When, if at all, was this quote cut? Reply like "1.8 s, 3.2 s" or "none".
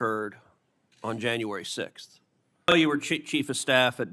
2.7 s